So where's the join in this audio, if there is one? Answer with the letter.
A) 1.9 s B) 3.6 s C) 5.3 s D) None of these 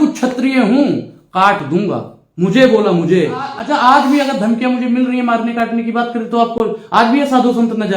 B